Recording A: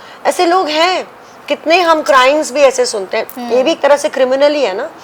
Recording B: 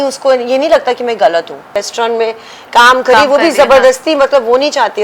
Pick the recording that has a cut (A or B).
B